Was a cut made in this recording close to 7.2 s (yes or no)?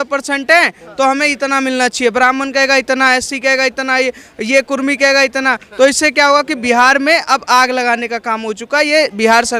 no